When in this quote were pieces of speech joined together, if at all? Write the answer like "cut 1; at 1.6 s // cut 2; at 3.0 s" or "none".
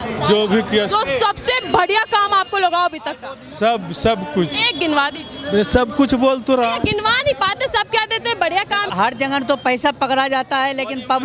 cut 1; at 8.9 s